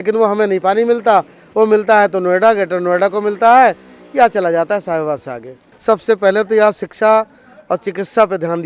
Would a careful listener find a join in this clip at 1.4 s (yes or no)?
no